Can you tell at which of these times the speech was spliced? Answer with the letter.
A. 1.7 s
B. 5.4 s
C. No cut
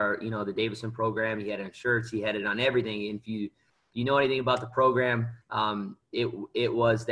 B